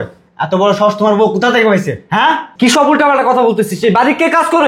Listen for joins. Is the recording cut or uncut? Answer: cut